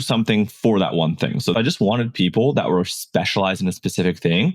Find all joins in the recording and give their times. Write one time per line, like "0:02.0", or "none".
0:01.5